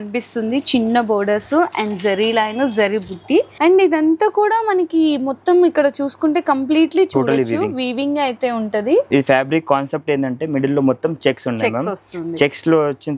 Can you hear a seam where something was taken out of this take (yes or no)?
yes